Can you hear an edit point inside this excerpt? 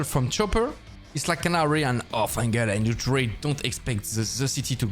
no; 0 cuts

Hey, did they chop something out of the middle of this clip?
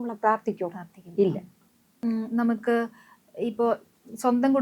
no; 0 cuts

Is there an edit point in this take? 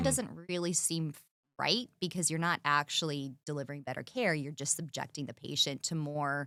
no; 0 cuts

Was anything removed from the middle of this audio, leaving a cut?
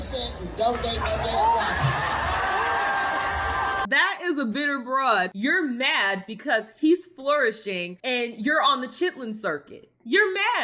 yes; 2 cuts; at 3.8 s, 5.3 s

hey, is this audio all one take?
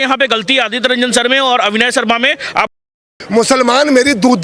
no; 1 cut; at 2.7 s

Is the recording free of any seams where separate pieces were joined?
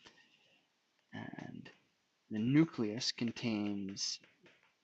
yes; 0 cuts

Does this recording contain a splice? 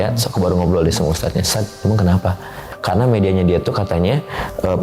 yes; 1 cut; at 2.7 s

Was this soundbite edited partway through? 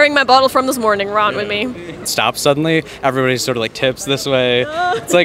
yes; 1 cut; at 2.1 s

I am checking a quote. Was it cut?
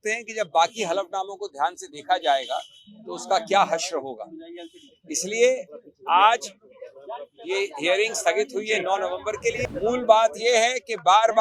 yes; 1 cut; at 9.6 s

